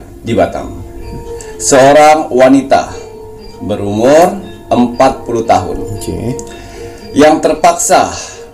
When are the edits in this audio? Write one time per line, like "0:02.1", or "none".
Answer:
0:01.4